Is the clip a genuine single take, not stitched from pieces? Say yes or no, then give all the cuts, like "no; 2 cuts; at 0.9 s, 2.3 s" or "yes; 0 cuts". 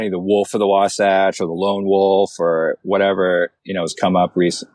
no; 1 cut; at 3.6 s